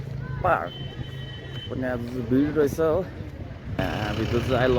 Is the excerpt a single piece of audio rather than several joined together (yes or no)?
no